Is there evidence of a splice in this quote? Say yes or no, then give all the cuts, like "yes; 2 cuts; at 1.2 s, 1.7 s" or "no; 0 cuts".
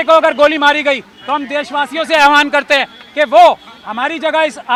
no; 0 cuts